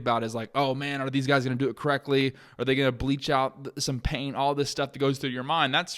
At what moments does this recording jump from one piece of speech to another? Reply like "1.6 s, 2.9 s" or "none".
none